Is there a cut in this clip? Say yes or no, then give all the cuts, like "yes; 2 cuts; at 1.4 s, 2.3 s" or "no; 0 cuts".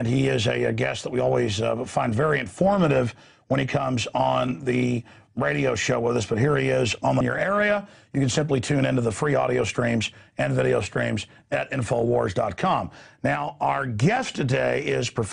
no; 0 cuts